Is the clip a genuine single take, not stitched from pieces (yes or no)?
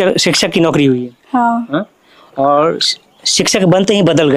yes